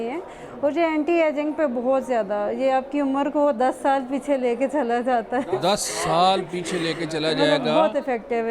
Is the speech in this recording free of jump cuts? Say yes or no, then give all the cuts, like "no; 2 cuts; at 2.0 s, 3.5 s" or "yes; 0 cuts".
yes; 0 cuts